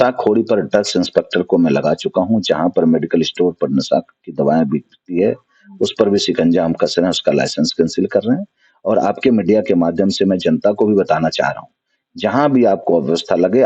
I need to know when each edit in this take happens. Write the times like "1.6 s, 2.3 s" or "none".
none

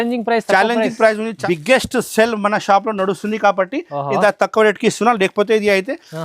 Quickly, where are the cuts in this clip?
1.3 s

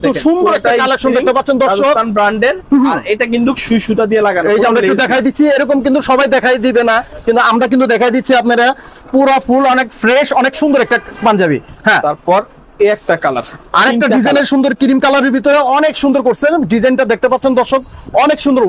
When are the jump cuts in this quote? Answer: none

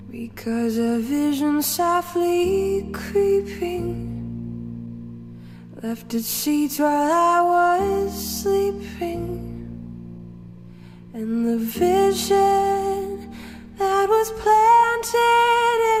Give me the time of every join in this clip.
none

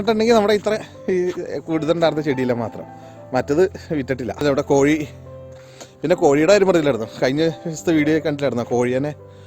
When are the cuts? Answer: 4.4 s

